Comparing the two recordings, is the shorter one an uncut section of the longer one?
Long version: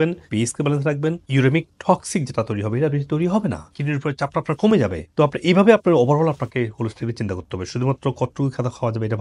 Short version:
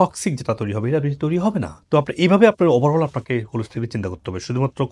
no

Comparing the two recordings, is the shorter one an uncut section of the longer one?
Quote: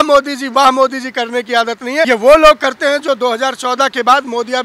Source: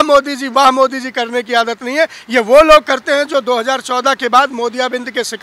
no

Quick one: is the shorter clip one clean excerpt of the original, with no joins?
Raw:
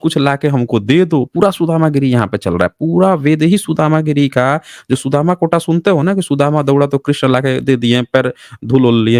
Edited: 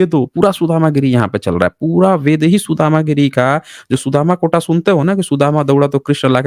yes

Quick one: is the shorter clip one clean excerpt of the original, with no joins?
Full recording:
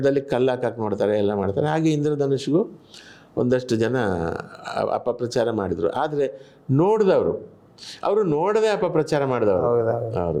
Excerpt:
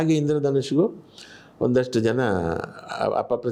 yes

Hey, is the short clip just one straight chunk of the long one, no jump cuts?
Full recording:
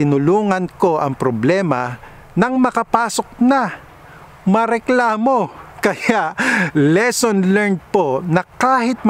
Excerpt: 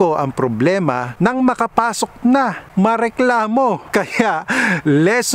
no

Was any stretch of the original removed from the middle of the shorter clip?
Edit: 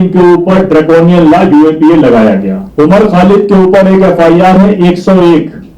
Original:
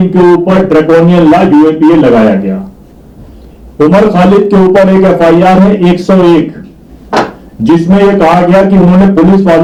yes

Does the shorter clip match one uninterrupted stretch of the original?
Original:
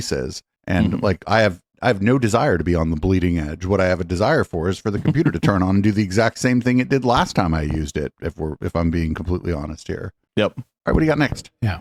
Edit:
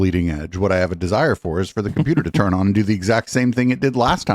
yes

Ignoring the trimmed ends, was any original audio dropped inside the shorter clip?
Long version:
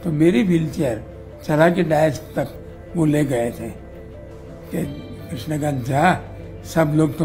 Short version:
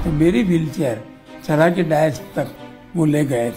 no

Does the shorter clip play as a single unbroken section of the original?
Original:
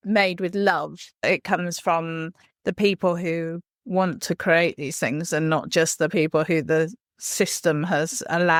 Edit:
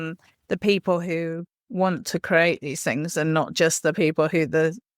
yes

